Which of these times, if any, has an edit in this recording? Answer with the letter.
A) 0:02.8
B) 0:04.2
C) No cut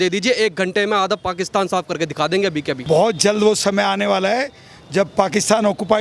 A